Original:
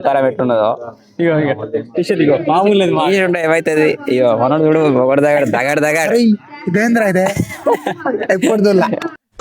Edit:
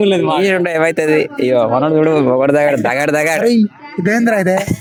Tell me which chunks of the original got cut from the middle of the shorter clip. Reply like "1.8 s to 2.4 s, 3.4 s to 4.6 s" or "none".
none